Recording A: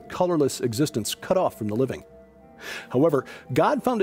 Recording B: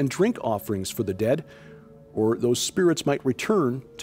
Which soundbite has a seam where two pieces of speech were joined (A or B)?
B